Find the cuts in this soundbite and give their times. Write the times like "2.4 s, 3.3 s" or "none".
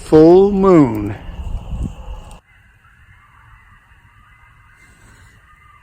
2.4 s